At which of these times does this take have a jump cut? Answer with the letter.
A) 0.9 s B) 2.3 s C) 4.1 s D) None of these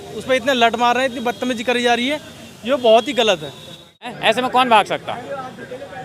C